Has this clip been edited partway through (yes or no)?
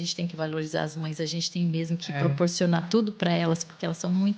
no